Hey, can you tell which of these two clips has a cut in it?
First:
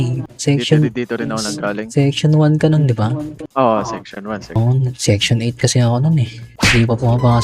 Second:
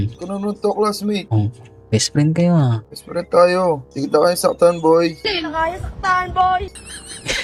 first; 1 cut; at 4.6 s

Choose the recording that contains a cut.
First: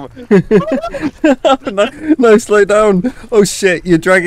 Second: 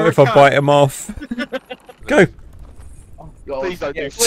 second; 1 cut; at 1.9 s

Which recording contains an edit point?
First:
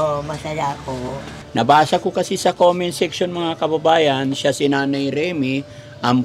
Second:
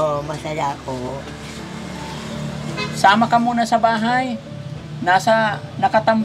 first; 1 cut; at 1.3 s

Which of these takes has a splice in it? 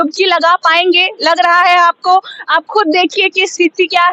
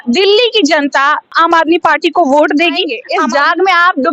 second; 2 cuts; at 1.4 s, 3.0 s

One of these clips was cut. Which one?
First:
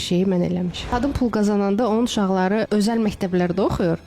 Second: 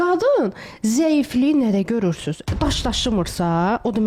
first; 2 cuts; at 0.9 s, 2.7 s

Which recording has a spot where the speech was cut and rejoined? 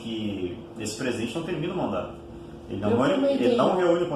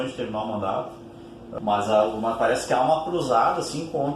second; 1 cut; at 1.4 s

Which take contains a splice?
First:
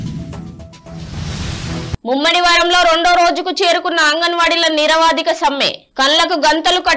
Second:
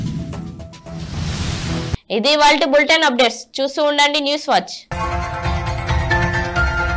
first; 1 cut; at 2.0 s

